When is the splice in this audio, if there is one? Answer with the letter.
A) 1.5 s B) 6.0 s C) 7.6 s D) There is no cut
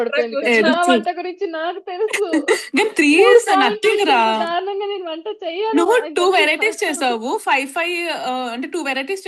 D